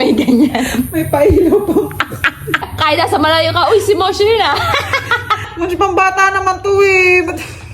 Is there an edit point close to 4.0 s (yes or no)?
no